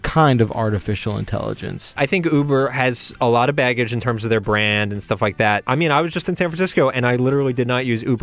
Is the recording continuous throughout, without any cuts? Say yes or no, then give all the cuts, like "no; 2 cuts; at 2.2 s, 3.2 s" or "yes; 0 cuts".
no; 2 cuts; at 2.0 s, 5.6 s